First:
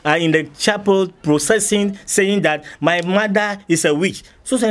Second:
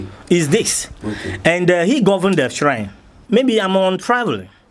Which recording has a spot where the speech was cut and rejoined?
second; 1 cut; at 3.1 s

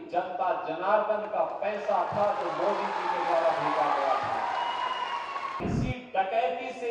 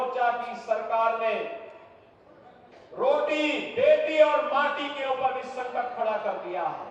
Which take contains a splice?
first; 1 cut; at 5.6 s

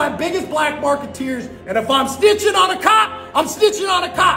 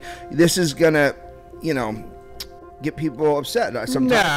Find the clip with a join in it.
first; 1 cut; at 1.6 s

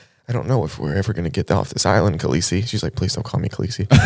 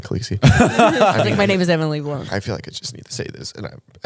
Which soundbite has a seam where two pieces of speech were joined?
second; 1 cut; at 2.2 s

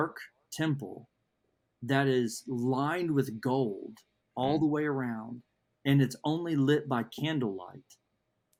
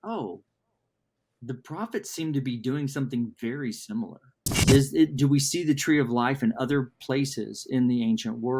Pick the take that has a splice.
second; 1 cut; at 4.5 s

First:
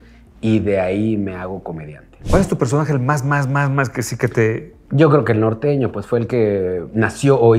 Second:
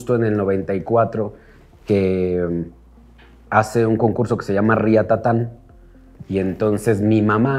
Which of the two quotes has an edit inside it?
first; 1 cut; at 2.1 s

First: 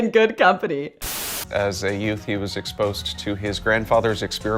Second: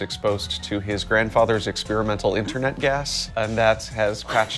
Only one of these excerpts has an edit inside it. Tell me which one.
first; 1 cut; at 1.1 s

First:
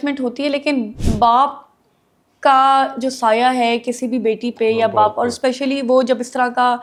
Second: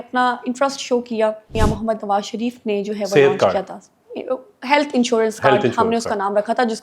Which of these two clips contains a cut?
second; 1 cut; at 1.5 s

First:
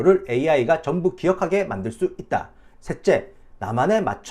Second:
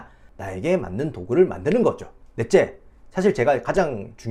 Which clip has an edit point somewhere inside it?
first; 1 cut; at 2.6 s

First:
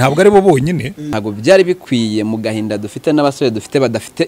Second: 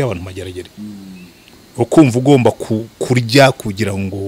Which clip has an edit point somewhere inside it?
first; 1 cut; at 1.1 s

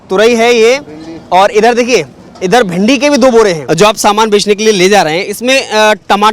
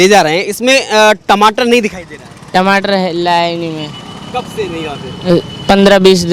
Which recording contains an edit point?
first; 1 cut; at 3.6 s

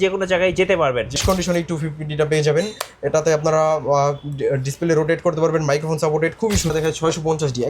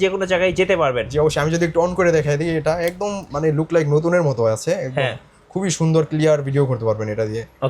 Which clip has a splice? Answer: first; 2 cuts; at 1.2 s, 6.7 s

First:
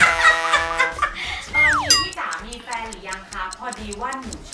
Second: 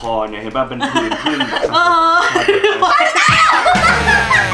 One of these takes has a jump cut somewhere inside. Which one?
first; 1 cut; at 1.4 s

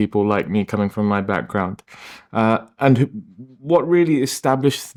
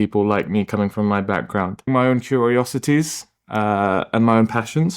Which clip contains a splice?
second; 1 cut; at 1.9 s

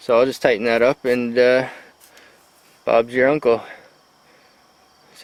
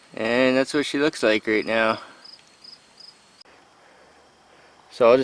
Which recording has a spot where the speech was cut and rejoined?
second; 1 cut; at 3.4 s

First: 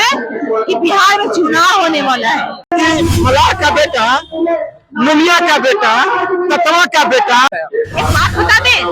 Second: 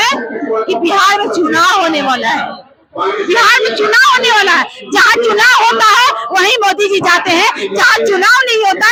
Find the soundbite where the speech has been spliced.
first; 2 cuts; at 2.7 s, 7.5 s

